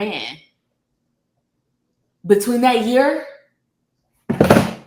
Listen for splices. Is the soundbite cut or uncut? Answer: uncut